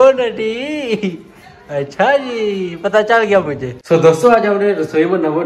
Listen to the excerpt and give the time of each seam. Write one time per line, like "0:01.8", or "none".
0:03.7